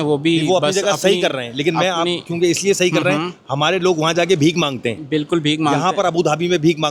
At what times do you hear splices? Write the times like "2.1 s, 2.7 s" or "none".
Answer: none